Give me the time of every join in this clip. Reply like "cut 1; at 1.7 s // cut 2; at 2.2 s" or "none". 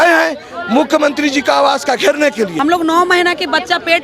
cut 1; at 2.5 s